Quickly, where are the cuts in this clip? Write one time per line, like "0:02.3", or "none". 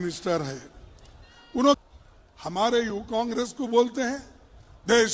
0:01.8